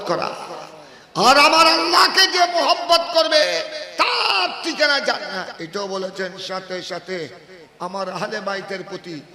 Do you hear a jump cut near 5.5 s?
yes; 1 cut; at 5.5 s

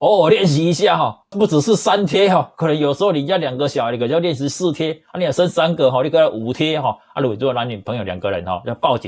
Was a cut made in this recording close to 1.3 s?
yes; 1 cut; at 1.3 s

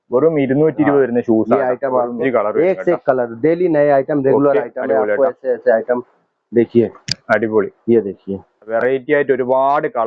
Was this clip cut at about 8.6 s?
yes; 2 cuts; at 2.2 s, 8.6 s

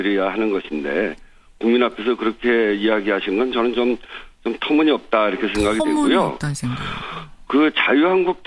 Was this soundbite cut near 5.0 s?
yes; 1 cut; at 5.0 s

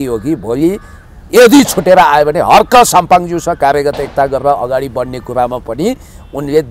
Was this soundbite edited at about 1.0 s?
no; 0 cuts

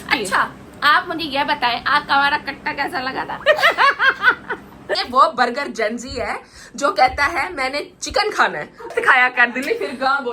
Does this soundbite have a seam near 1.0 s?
no; 2 cuts; at 5.0 s, 8.9 s

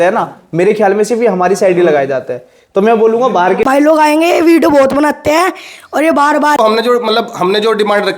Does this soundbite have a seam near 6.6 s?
yes; 2 cuts; at 3.7 s, 6.6 s

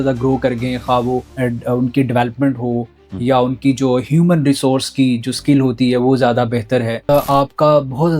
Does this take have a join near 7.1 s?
yes; 1 cut; at 7.1 s

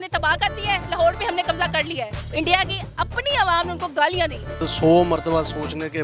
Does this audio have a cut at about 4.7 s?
yes; 2 cuts; at 2.2 s, 4.7 s

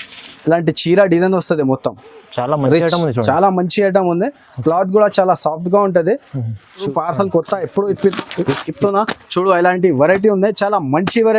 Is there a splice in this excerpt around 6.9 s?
yes; 1 cut; at 6.9 s

